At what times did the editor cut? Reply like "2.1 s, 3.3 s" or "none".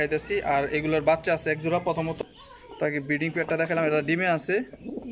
2.2 s